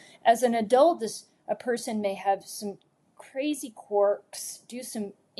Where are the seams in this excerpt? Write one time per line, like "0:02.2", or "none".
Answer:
none